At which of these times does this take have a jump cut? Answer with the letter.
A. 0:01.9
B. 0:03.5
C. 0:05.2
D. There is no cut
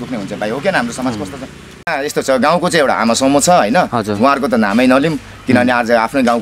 A